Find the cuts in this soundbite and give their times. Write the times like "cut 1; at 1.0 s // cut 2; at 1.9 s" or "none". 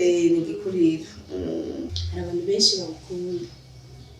cut 1; at 2.0 s